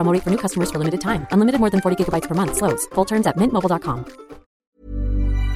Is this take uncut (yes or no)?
no